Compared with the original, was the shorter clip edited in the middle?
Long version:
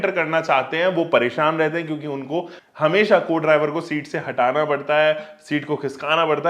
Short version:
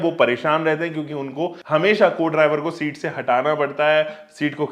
yes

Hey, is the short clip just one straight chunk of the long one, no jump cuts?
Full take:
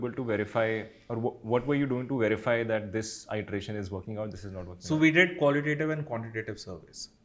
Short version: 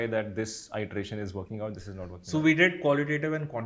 yes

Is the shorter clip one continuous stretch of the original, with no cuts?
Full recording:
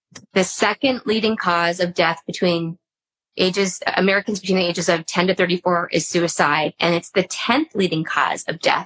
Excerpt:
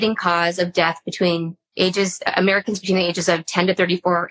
no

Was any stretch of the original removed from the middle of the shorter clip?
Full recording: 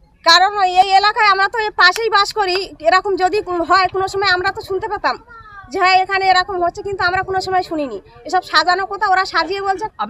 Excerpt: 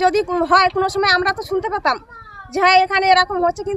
no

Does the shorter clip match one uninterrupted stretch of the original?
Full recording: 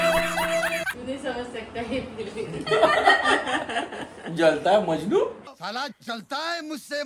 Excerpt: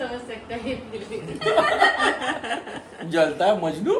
yes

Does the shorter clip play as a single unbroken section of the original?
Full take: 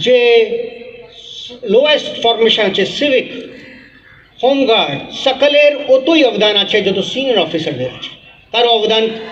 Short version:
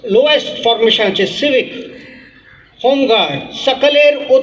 yes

